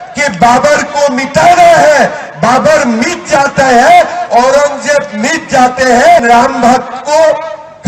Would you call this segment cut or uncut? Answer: cut